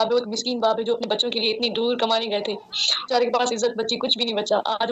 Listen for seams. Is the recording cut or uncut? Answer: cut